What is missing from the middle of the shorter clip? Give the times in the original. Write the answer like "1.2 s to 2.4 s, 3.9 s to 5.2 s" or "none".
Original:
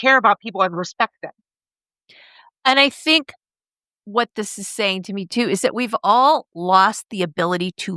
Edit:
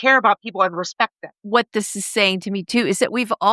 1.3 s to 3.9 s